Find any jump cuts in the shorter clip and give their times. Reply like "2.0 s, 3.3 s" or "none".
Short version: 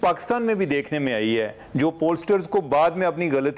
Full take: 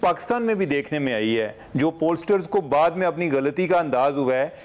none